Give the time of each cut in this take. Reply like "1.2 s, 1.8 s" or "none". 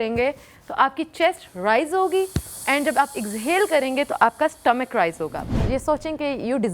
5.5 s